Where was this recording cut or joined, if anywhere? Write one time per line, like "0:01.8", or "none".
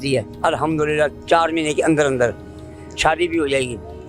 none